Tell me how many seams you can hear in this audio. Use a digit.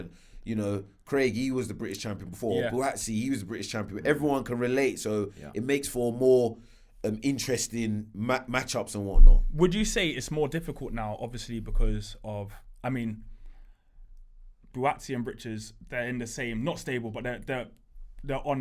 0